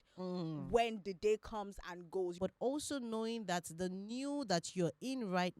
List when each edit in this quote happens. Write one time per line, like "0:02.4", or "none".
0:02.3